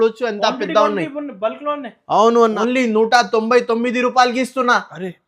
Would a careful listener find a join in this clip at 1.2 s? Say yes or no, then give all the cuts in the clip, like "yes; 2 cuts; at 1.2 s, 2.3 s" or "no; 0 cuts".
no; 1 cut; at 2.6 s